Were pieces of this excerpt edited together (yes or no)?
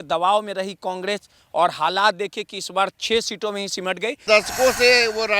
yes